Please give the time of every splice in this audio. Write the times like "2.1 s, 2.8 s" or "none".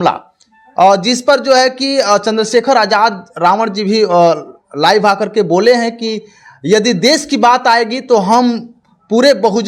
none